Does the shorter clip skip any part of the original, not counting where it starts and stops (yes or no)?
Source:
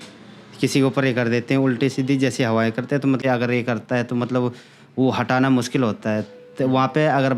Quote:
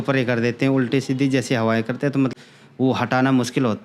yes